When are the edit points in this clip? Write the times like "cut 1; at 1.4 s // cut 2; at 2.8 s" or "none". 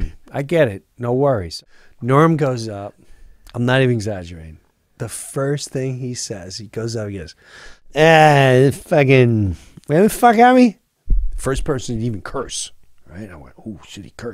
cut 1; at 1.6 s // cut 2; at 7.8 s